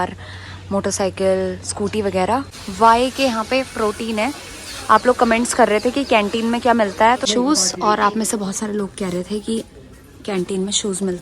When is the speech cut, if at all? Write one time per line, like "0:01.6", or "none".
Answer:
0:02.6
0:07.3